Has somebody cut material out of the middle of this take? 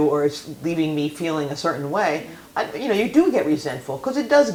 no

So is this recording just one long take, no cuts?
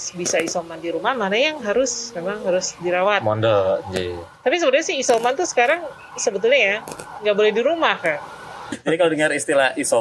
no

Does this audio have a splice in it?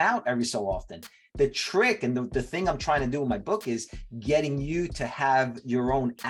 no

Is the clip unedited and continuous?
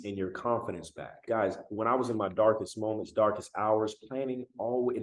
no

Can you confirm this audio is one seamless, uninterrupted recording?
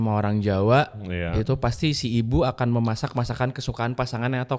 yes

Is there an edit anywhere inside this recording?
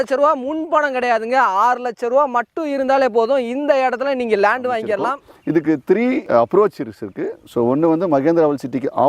yes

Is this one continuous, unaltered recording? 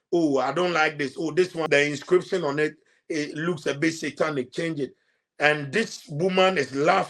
no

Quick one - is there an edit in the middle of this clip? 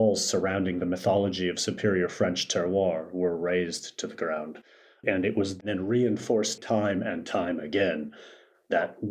yes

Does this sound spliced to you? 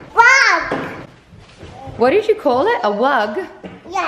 yes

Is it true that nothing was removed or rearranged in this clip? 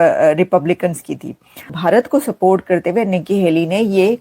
no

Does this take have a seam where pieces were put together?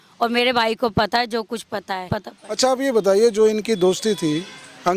yes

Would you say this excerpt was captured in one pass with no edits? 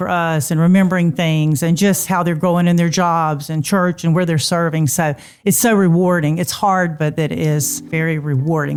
yes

